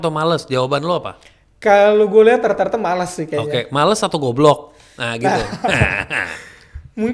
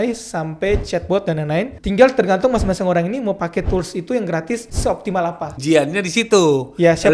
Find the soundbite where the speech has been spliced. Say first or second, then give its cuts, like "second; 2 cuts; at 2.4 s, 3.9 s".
second; 2 cuts; at 1.8 s, 4.9 s